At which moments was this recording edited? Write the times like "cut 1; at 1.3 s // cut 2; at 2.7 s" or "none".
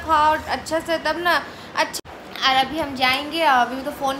cut 1; at 1.9 s